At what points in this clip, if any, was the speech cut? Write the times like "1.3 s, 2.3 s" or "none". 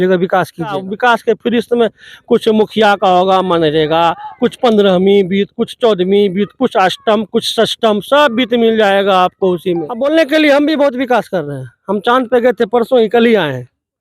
0.8 s, 9.9 s